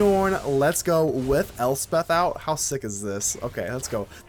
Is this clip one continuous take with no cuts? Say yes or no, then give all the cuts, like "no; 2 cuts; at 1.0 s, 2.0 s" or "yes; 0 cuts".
yes; 0 cuts